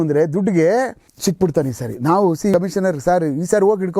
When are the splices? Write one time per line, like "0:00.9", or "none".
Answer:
0:01.0
0:02.5